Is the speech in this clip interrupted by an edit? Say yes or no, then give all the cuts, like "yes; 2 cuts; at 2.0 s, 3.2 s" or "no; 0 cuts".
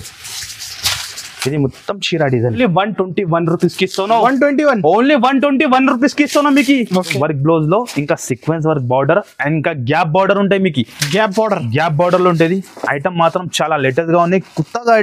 yes; 2 cuts; at 2.6 s, 7.1 s